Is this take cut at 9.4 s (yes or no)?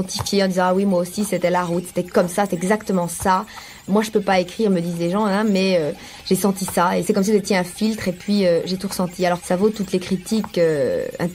yes